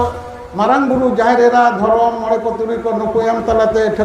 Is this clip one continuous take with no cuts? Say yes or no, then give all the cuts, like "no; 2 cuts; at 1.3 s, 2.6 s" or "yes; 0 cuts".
yes; 0 cuts